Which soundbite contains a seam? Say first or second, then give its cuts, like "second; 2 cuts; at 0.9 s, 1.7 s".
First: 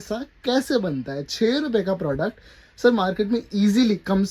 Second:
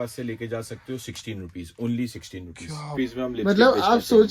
second; 1 cut; at 2.9 s